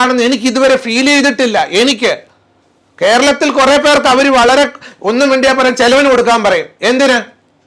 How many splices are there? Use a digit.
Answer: 0